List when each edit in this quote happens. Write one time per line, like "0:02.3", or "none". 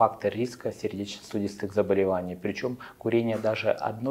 none